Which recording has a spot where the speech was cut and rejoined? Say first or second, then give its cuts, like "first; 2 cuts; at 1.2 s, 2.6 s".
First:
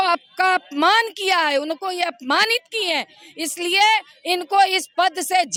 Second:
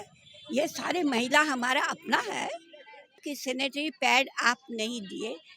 second; 1 cut; at 3.2 s